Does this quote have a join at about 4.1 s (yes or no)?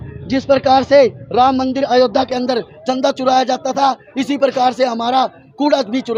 no